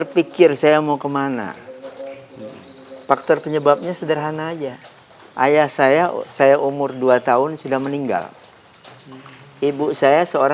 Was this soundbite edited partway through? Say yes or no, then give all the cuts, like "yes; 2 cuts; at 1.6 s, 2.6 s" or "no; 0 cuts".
no; 0 cuts